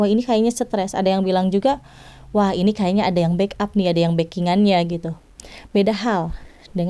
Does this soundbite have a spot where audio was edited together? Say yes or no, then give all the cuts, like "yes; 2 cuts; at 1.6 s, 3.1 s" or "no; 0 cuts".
yes; 1 cut; at 5.1 s